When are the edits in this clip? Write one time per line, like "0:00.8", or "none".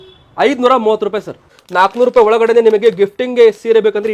0:01.6